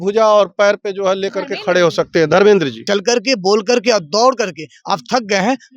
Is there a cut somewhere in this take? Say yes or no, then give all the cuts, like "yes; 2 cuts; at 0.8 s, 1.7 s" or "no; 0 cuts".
yes; 1 cut; at 2.8 s